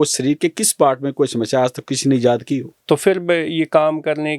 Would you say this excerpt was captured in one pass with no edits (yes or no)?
no